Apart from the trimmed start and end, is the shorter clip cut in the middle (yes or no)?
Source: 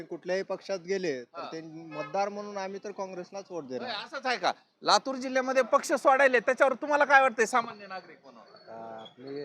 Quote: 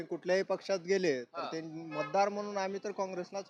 no